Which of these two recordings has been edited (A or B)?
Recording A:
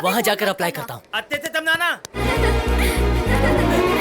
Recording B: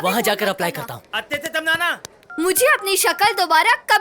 A